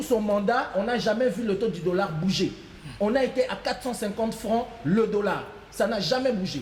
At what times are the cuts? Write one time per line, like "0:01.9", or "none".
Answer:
none

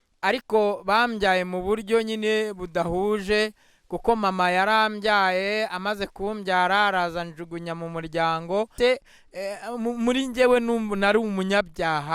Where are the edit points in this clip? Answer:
0:08.7

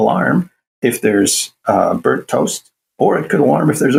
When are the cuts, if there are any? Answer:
none

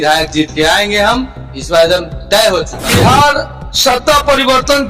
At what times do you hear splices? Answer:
0:02.8

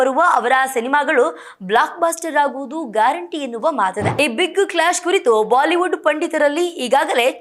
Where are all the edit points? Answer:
0:04.1

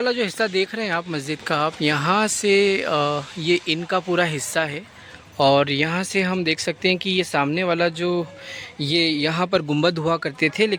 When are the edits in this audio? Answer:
none

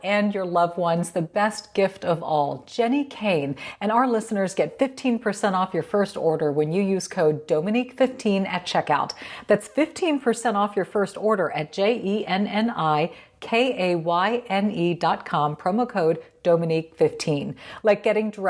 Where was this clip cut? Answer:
none

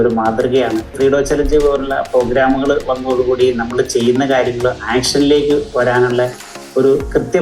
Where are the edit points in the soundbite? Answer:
0:00.9

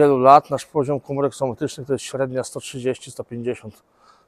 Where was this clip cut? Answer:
none

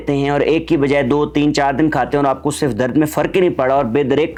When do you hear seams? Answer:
none

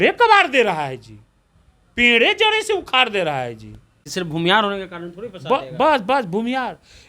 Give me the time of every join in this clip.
0:04.1

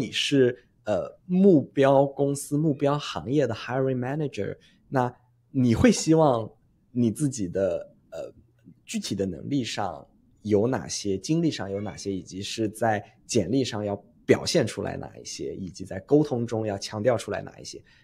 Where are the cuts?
none

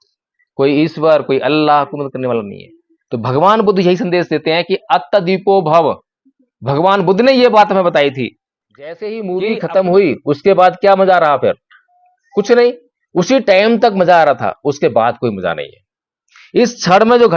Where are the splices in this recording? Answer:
0:09.1

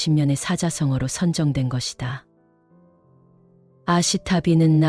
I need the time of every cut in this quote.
0:02.3
0:03.7

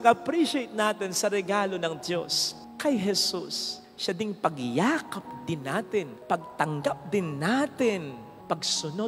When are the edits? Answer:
none

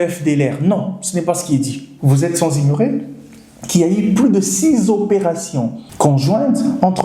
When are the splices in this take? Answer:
0:01.8
0:05.8

